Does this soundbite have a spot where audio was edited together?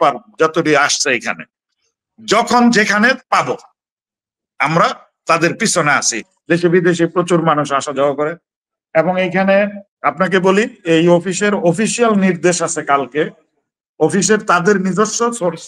yes; 1 cut; at 6.3 s

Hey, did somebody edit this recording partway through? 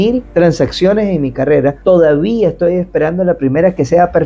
no; 0 cuts

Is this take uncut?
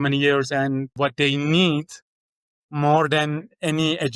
no; 1 cut; at 0.9 s

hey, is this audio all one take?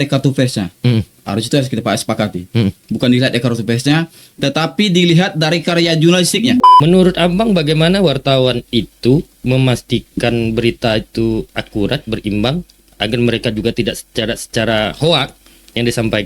no; 1 cut; at 6.7 s

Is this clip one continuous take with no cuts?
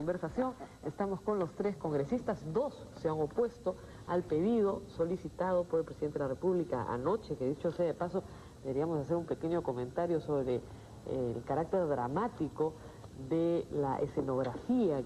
no; 1 cut; at 10.4 s

